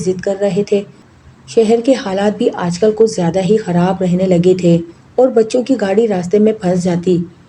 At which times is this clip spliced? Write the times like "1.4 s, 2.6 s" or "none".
5.0 s